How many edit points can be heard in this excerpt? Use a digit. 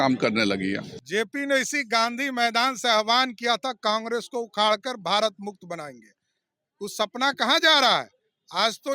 1